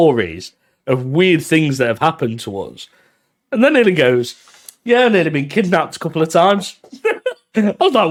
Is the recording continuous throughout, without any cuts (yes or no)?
yes